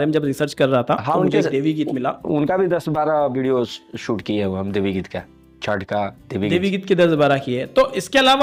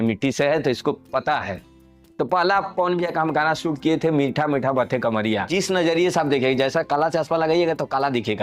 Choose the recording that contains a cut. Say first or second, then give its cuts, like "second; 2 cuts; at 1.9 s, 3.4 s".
second; 1 cut; at 5.5 s